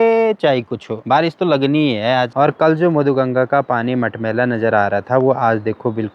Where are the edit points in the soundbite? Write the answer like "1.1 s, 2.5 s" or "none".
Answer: none